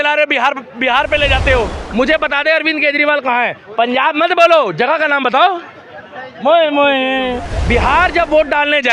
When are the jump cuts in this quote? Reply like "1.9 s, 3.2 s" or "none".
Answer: 1.8 s, 7.5 s